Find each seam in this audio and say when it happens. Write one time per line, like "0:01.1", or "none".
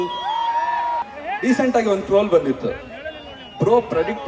0:01.0